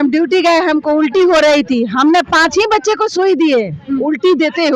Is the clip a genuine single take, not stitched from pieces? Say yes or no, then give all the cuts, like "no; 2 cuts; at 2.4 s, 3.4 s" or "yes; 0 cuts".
yes; 0 cuts